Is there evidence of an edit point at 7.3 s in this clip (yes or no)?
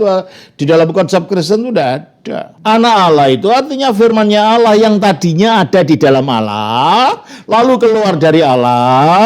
no